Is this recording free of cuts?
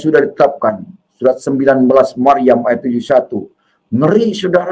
yes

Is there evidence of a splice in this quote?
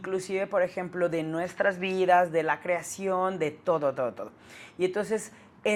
no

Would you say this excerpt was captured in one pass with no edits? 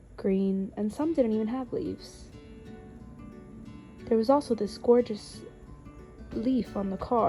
yes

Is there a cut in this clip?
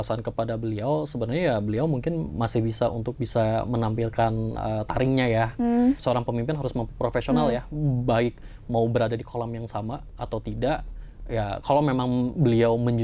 yes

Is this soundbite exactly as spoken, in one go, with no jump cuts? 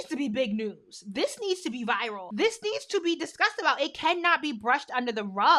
no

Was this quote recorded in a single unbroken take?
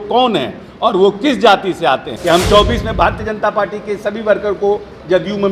no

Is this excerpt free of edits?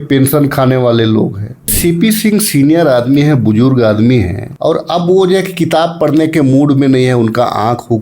no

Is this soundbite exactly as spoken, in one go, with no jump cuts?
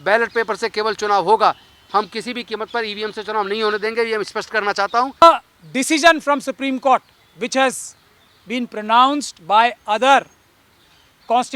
no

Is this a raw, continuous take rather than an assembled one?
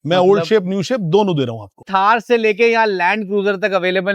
no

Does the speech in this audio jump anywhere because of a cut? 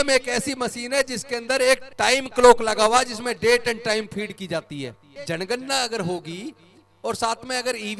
yes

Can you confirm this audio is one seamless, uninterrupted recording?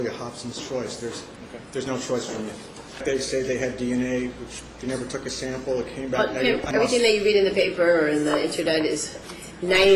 no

